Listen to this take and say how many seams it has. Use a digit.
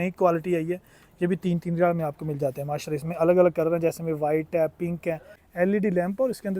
1